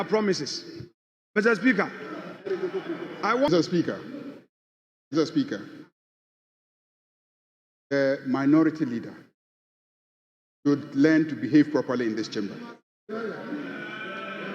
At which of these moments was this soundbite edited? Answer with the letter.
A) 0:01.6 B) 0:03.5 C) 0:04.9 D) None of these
B